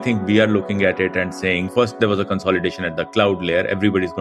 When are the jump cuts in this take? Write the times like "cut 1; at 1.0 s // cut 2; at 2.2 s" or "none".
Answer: cut 1; at 1.6 s